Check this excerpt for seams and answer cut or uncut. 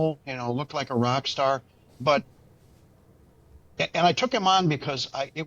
uncut